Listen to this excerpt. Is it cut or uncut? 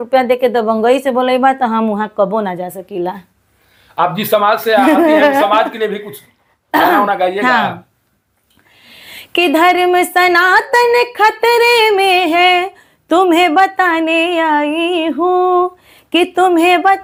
uncut